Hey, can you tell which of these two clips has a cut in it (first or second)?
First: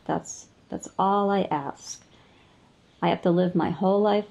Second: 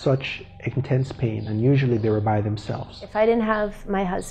second